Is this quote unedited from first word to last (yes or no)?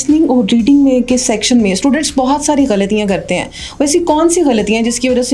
yes